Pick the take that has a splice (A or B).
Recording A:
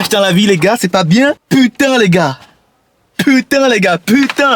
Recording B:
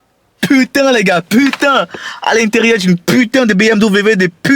A